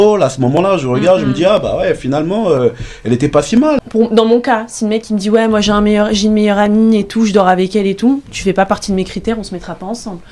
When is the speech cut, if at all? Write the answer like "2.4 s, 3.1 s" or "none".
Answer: 3.9 s